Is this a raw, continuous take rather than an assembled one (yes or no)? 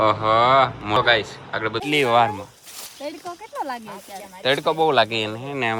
no